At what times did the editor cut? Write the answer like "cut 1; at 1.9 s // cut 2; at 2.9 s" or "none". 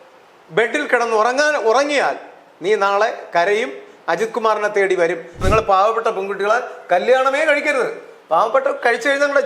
cut 1; at 5.4 s